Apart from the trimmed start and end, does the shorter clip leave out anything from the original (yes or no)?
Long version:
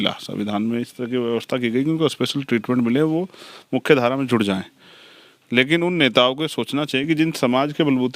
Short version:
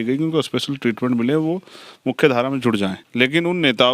yes